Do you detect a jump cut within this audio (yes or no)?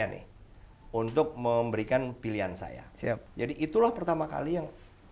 yes